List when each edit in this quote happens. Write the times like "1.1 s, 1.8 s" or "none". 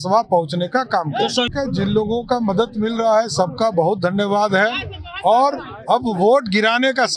1.5 s